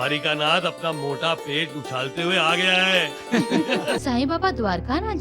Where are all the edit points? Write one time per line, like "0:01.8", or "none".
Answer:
0:04.0